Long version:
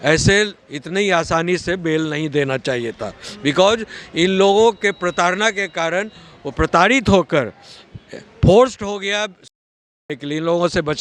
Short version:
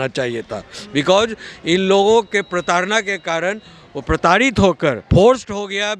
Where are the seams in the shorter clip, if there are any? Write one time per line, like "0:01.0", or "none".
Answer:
0:05.0